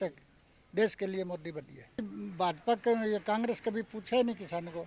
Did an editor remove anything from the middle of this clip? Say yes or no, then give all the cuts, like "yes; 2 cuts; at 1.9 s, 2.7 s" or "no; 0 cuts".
yes; 1 cut; at 2.0 s